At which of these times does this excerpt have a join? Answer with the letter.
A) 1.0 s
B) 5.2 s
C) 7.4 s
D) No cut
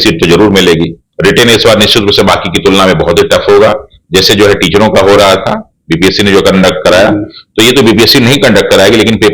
A